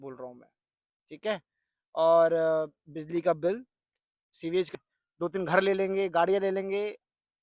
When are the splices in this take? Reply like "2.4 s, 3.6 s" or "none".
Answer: 4.7 s